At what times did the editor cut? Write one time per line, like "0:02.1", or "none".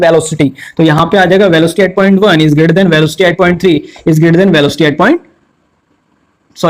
none